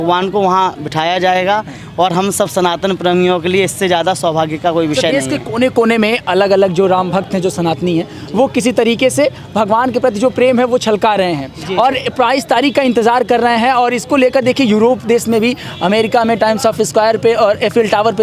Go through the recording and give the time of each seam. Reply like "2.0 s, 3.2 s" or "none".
none